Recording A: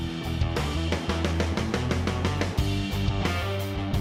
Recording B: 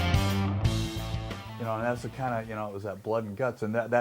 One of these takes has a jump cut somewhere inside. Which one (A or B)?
B